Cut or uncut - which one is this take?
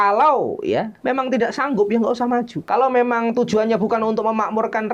cut